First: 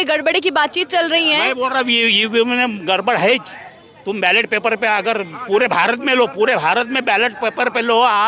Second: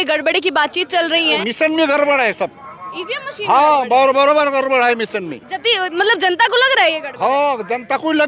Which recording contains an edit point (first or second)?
second